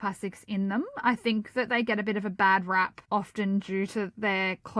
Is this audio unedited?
no; 1 cut; at 3.0 s

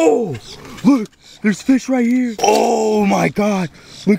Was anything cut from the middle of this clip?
yes; 1 cut; at 2.3 s

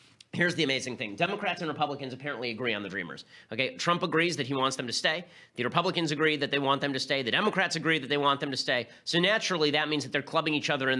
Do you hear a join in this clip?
no; 0 cuts

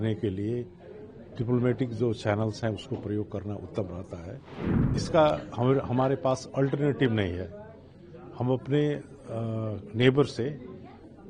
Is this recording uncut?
no; 1 cut; at 4.9 s

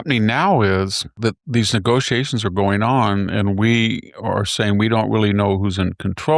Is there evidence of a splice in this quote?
yes; 1 cut; at 1.1 s

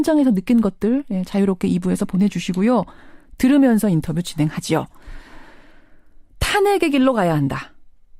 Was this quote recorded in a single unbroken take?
no; 1 cut; at 6.3 s

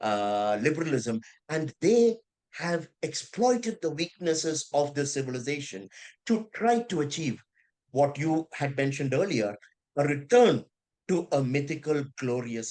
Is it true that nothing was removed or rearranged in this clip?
yes; 0 cuts

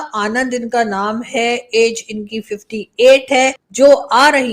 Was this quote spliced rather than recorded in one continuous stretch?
yes; 1 cut; at 3.6 s

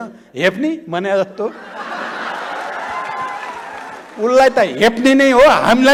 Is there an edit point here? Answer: no; 0 cuts

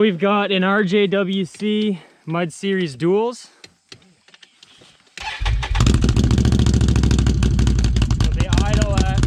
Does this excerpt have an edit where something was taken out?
no; 0 cuts

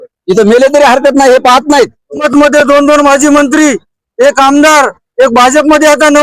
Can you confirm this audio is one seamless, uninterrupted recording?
no; 1 cut; at 2.3 s

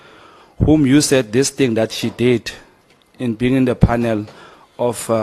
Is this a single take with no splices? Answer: yes; 0 cuts

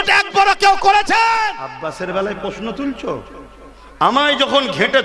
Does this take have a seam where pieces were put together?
yes; 1 cut; at 1.7 s

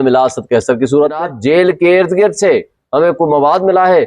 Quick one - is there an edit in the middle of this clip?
yes; 1 cut; at 1.3 s

